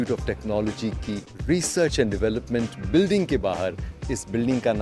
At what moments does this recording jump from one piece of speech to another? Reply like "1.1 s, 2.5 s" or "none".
1.3 s